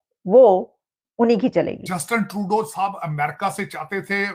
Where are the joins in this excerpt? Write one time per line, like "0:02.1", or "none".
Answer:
0:01.8